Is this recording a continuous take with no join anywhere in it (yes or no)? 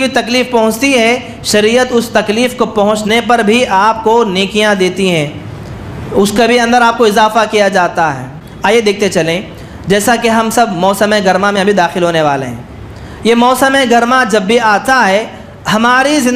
no